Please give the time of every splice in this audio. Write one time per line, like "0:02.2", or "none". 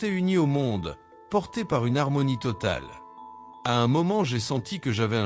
none